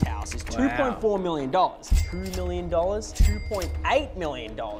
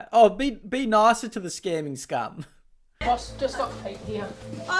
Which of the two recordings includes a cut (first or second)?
second